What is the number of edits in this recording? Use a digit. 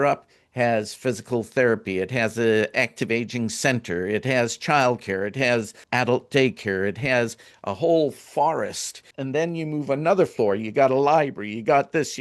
3